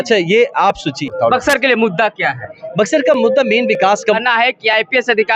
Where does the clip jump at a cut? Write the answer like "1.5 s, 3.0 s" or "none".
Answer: 1.1 s, 4.2 s